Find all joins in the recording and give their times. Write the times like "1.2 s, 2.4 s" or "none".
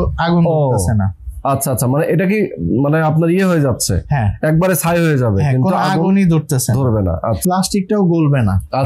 7.4 s

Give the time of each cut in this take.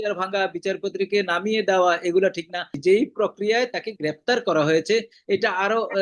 2.7 s

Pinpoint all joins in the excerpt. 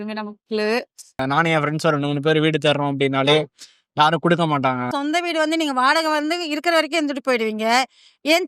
1.2 s, 4.9 s

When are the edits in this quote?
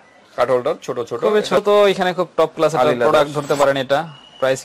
1.6 s

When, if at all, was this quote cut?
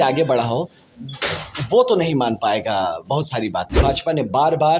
3.7 s

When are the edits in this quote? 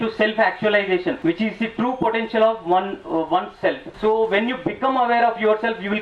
1.2 s, 3.9 s

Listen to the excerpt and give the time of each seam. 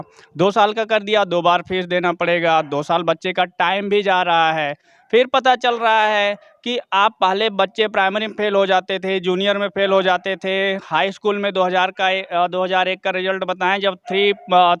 none

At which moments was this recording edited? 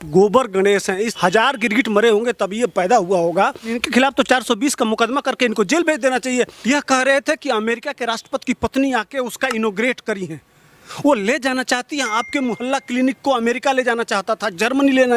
1.1 s, 3.8 s, 6.6 s

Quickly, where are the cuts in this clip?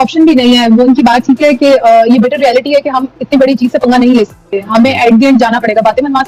none

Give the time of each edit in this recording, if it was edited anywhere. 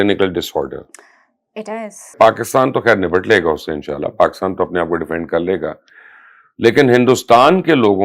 2.1 s

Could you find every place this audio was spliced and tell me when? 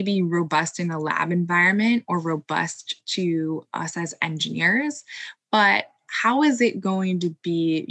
none

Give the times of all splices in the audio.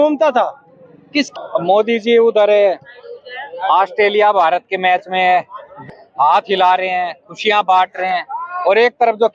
1.3 s, 5.8 s

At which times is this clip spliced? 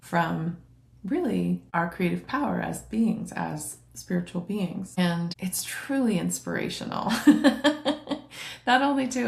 none

